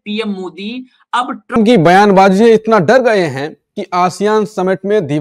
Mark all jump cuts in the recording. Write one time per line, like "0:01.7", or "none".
0:01.5